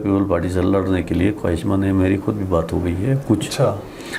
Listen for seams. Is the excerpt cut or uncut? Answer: uncut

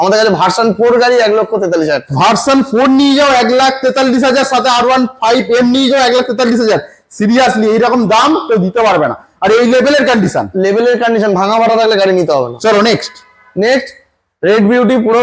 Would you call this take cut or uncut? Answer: uncut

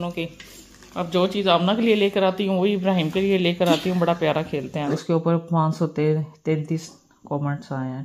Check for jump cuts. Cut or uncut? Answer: cut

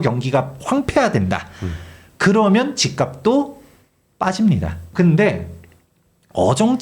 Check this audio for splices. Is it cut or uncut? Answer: cut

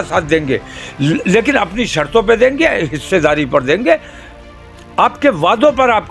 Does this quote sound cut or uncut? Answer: uncut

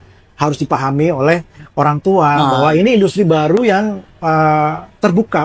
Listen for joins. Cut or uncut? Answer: uncut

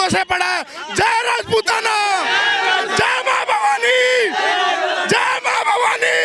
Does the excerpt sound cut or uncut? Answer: uncut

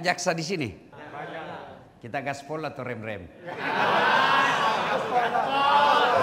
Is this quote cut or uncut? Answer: cut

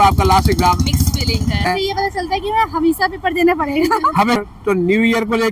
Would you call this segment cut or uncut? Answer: cut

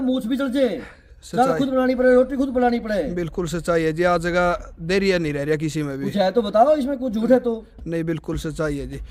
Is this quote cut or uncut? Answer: uncut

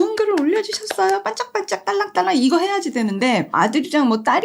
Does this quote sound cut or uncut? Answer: cut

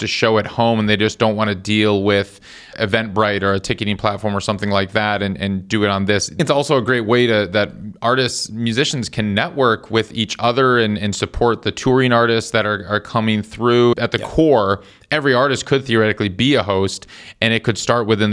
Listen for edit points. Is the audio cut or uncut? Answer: cut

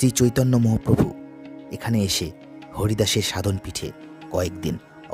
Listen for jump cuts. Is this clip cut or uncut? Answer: uncut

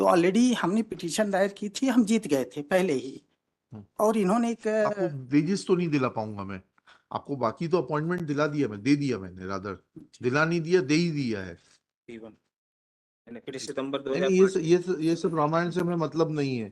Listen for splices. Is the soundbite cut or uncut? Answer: cut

